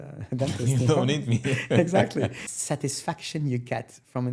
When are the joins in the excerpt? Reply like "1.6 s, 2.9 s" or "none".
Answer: 2.4 s